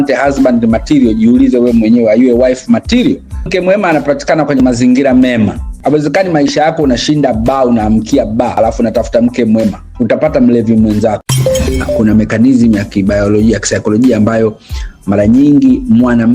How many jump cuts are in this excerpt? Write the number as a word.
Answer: four